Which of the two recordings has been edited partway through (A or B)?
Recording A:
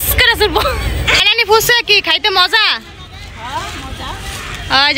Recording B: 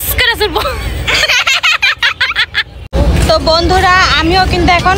A